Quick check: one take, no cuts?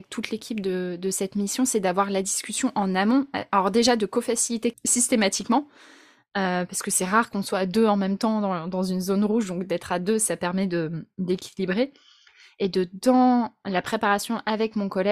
no; 1 cut; at 4.8 s

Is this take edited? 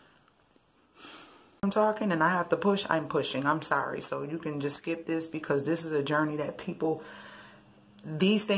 yes; 1 cut; at 1.6 s

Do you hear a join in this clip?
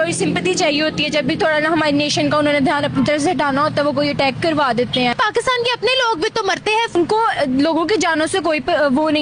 yes; 2 cuts; at 5.1 s, 6.9 s

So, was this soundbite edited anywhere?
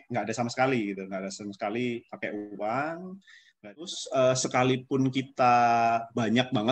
yes; 1 cut; at 3.9 s

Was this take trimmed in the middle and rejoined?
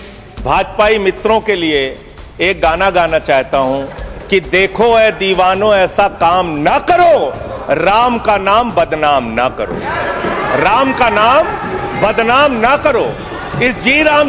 no; 0 cuts

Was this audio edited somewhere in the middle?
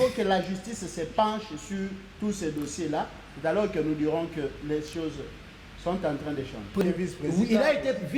yes; 1 cut; at 6.8 s

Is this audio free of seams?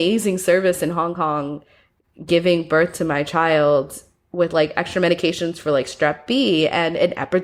yes; 0 cuts

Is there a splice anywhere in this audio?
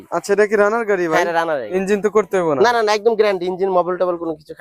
yes; 1 cut; at 1.7 s

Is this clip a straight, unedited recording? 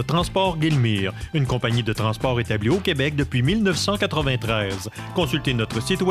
yes; 0 cuts

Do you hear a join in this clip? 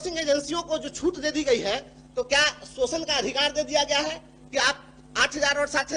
no; 0 cuts

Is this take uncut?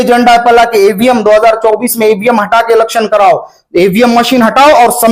yes; 0 cuts

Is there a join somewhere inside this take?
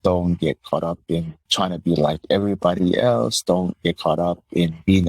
yes; 1 cut; at 1.5 s

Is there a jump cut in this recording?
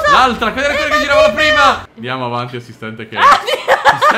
yes; 1 cut; at 1.9 s

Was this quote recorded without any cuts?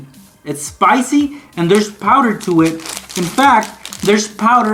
yes; 0 cuts

